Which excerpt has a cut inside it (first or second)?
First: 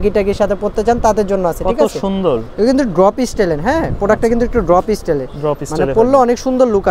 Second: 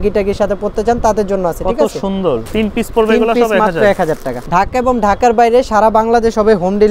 second